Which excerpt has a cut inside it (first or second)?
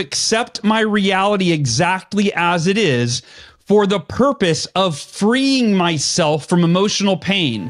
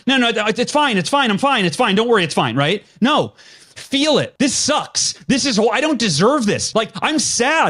second